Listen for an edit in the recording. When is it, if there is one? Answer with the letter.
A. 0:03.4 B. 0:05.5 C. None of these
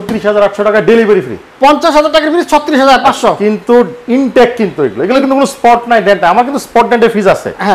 C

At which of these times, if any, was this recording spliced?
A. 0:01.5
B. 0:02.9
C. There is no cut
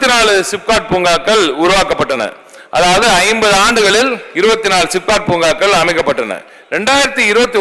C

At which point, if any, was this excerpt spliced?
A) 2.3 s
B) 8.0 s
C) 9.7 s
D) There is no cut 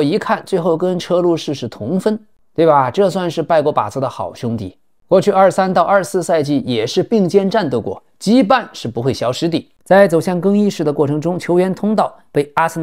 C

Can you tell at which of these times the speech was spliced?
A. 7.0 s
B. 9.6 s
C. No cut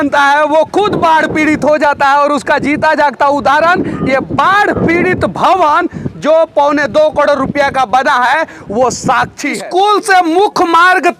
B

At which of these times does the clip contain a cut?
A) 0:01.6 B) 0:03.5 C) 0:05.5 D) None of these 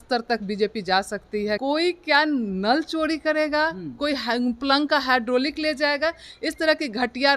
A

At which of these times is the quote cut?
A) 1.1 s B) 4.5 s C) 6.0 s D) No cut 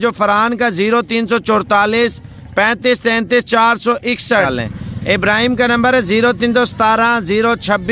B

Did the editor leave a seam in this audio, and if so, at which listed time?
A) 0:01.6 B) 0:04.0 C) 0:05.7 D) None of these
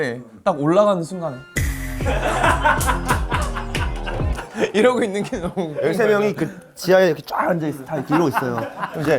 D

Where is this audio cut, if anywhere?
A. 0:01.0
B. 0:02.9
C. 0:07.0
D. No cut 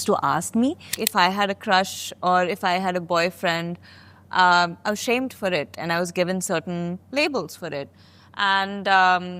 A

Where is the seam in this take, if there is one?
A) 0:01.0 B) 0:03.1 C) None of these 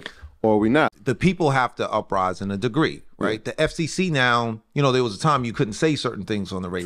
A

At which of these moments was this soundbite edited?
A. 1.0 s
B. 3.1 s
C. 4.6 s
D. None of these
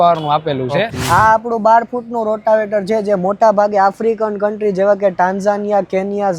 A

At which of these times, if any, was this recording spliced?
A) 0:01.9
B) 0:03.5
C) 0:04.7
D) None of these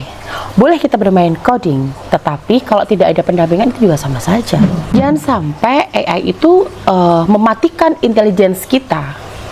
C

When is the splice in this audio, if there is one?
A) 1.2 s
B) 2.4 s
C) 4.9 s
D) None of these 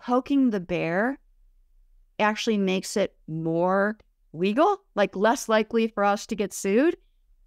D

